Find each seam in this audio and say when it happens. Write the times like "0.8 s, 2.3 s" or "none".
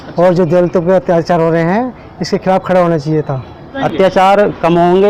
3.8 s